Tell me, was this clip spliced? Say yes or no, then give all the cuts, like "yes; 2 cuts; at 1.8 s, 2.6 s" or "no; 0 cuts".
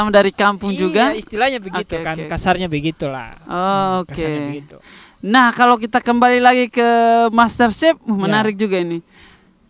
no; 0 cuts